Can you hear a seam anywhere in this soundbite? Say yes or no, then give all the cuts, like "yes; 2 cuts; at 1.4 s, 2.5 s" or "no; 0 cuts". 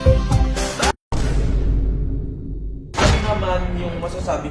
yes; 2 cuts; at 0.9 s, 2.9 s